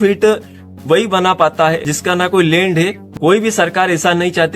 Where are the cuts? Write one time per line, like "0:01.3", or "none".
0:01.9
0:03.0